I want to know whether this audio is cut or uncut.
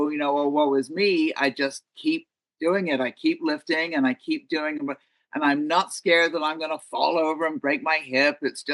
uncut